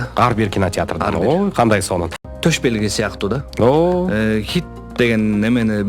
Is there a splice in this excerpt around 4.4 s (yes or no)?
no